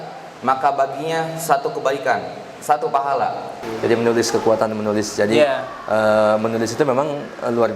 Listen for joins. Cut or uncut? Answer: cut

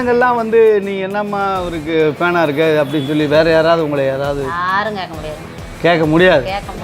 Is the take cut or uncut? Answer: uncut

